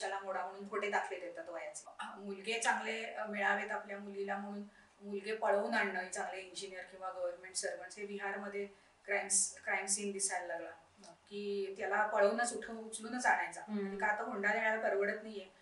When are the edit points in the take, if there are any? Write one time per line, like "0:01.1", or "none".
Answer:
0:02.0